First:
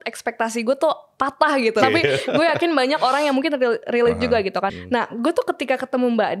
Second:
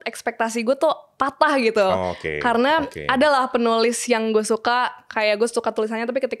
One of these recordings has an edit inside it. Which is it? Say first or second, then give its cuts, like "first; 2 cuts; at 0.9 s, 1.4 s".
first; 2 cuts; at 1.8 s, 4.7 s